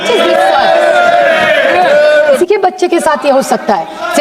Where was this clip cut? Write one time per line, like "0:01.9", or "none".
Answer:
0:02.4